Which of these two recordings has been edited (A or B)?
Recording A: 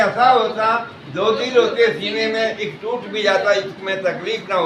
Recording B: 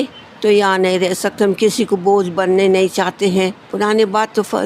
B